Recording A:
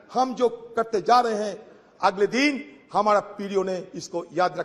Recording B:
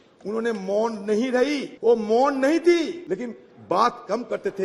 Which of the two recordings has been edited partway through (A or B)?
B